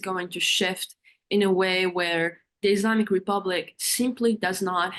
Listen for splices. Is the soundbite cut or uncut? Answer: uncut